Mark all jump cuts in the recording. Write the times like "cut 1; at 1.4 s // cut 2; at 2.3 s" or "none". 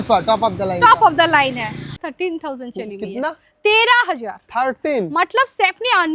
cut 1; at 1.9 s

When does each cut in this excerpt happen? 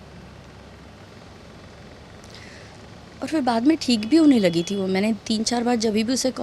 none

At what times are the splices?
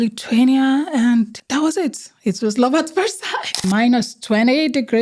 cut 1; at 1.4 s // cut 2; at 3.6 s

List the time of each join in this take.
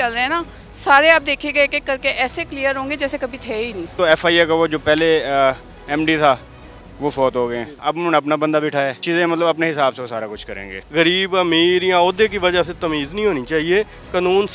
cut 1; at 3.9 s // cut 2; at 7.8 s // cut 3; at 9.0 s // cut 4; at 10.8 s

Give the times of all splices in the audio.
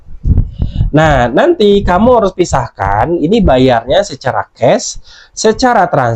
none

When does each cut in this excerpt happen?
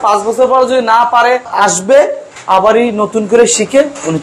none

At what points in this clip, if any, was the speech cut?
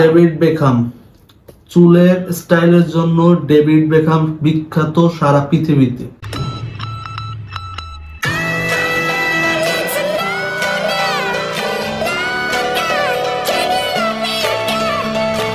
none

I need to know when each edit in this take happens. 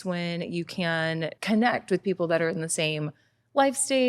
cut 1; at 1.4 s

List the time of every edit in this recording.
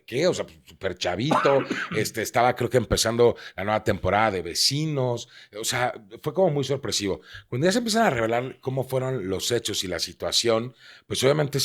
none

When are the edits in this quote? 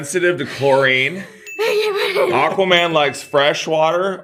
none

